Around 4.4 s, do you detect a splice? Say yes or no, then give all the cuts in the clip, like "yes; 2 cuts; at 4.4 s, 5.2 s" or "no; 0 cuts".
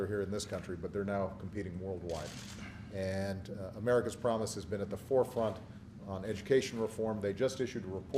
no; 1 cut; at 6.9 s